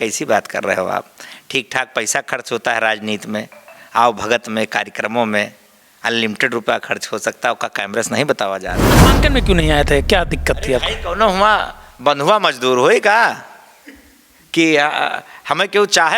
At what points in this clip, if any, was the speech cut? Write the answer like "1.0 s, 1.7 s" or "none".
9.0 s